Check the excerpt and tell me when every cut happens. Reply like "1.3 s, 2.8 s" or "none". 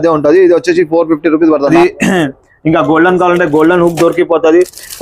1.7 s

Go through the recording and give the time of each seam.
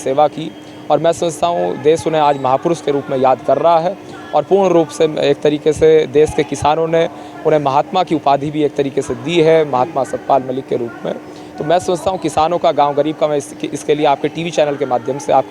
none

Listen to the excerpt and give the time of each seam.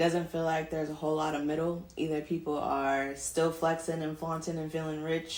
none

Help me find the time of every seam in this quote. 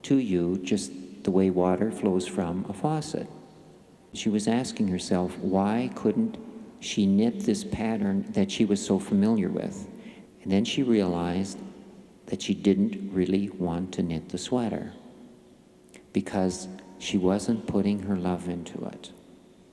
4.1 s

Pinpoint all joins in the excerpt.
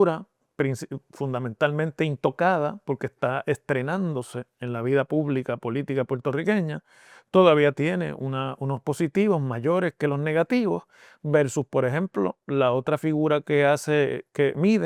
none

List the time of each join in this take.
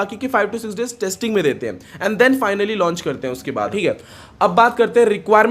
3.7 s

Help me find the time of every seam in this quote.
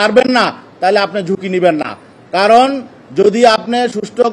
none

